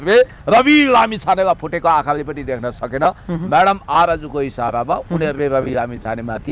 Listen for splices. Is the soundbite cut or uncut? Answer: uncut